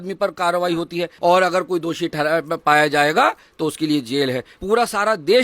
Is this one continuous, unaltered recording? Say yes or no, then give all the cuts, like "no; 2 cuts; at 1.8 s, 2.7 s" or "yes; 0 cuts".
no; 2 cuts; at 1.1 s, 4.5 s